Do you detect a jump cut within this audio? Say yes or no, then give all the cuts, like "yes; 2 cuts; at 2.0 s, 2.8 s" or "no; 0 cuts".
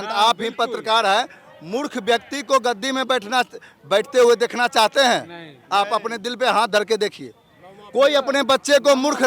no; 0 cuts